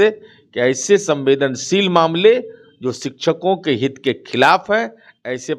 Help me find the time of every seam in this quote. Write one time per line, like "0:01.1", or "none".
none